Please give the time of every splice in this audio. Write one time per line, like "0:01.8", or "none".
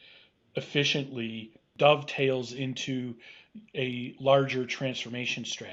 0:01.7